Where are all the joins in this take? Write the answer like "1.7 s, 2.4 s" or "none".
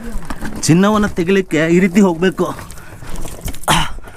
none